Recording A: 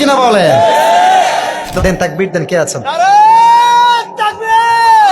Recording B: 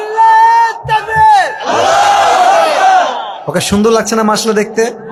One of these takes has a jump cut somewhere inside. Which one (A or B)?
A